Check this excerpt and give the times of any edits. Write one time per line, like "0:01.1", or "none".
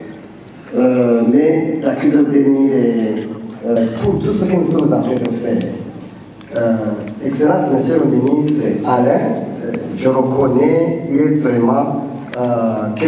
0:03.8